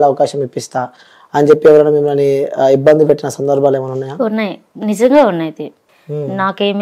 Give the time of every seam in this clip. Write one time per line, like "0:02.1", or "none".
0:05.8

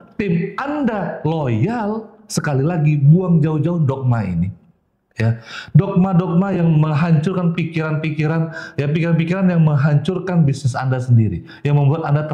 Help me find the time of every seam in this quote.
none

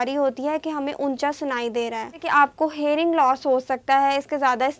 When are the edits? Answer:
0:02.2

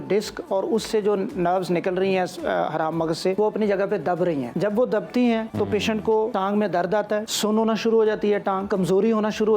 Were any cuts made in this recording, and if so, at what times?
0:03.3
0:04.5
0:05.9
0:07.3
0:08.6

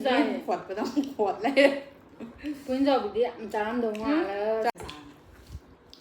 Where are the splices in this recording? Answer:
0:04.7

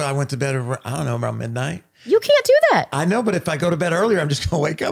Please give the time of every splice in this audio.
none

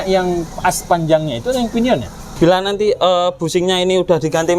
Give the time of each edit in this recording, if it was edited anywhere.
0:02.2

